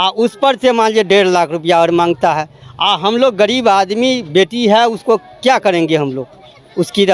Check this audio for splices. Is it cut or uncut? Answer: uncut